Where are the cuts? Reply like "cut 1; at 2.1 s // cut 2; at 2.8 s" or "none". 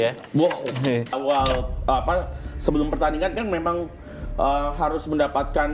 cut 1; at 1.2 s